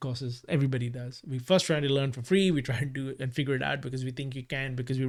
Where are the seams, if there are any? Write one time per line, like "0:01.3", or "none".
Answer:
none